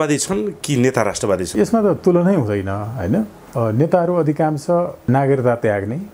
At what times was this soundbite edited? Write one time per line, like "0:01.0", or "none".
0:01.5
0:03.4
0:05.0